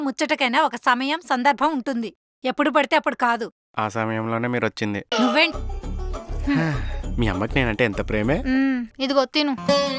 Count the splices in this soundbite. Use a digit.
1